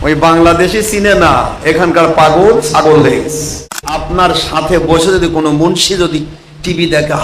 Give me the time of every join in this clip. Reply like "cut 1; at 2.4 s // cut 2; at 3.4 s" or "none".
cut 1; at 4.0 s